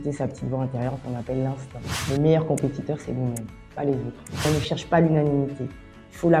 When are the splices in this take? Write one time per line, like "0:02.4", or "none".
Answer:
0:02.0
0:04.5